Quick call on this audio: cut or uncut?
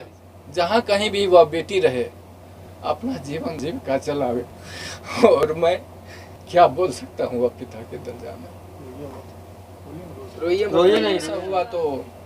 cut